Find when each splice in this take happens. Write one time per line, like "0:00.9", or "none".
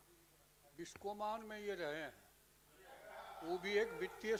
none